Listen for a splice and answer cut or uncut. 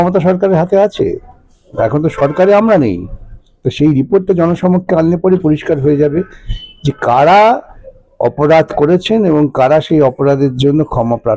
uncut